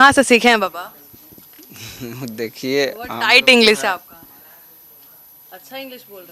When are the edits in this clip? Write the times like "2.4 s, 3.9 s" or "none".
none